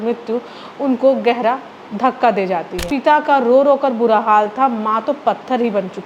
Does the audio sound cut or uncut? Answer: cut